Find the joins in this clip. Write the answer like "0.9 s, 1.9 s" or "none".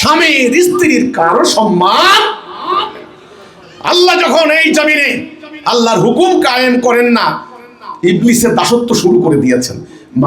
none